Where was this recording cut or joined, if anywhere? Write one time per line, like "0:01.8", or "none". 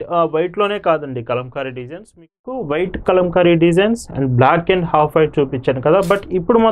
0:02.5